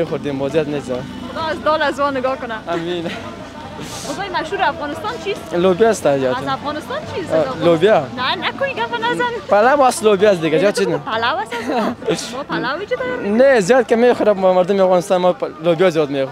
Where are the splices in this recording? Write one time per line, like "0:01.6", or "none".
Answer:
none